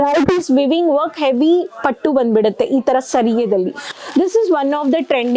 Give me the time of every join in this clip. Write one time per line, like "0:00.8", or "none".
0:04.0

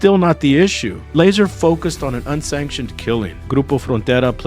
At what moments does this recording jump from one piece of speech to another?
0:01.0
0:03.4

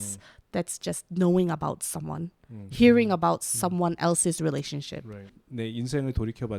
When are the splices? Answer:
0:05.4

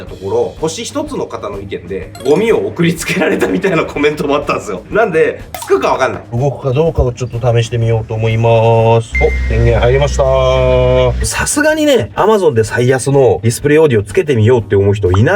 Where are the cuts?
0:02.0
0:04.9
0:06.4
0:09.1
0:11.2

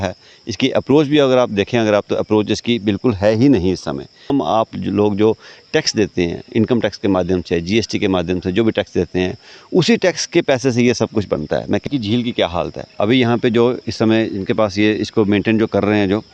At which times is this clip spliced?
0:04.3
0:11.8

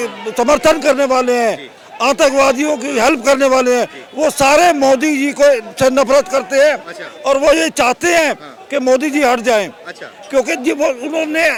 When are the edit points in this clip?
none

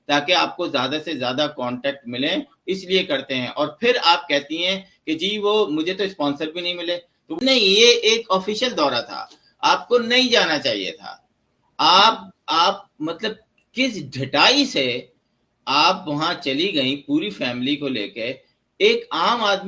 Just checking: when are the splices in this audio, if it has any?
0:07.4

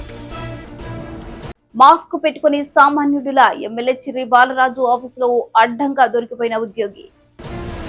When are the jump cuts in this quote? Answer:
none

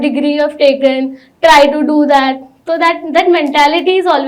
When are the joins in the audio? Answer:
none

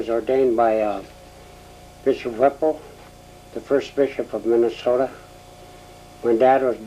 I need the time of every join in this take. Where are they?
0:05.6

